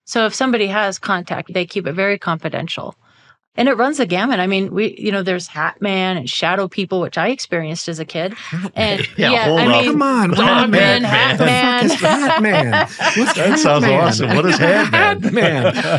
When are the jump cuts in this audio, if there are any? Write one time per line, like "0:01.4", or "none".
0:01.5
0:03.3